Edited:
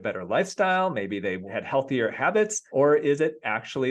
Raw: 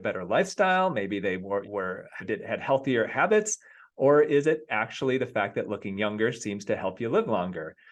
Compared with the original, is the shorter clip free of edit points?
no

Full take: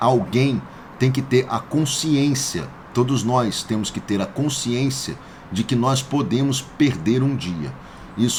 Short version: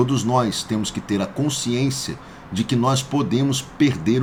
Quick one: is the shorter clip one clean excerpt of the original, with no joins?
yes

